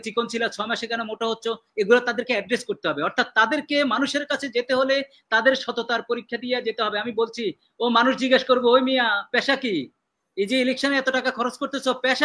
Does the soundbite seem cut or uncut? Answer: uncut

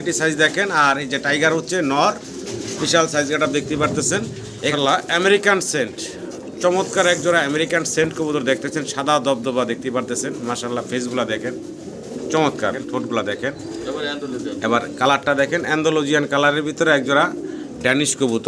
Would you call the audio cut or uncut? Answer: cut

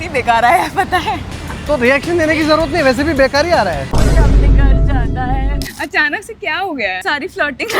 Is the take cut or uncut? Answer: cut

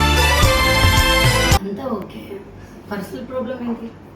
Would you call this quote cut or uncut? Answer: cut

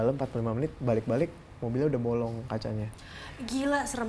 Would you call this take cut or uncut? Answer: uncut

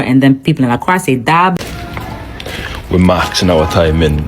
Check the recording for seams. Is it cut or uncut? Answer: cut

